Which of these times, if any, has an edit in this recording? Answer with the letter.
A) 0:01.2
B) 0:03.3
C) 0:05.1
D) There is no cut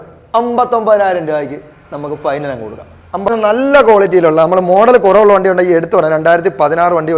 B